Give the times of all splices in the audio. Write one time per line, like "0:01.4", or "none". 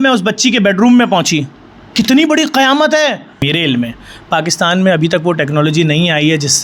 0:03.5